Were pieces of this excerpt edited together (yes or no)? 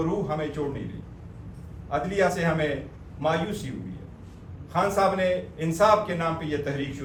no